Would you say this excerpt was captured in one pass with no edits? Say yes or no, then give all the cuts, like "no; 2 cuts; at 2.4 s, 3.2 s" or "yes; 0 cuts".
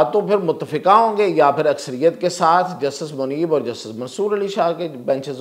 yes; 0 cuts